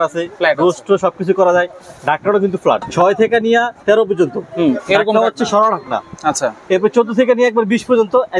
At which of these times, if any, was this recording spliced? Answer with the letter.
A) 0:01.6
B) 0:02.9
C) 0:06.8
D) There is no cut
B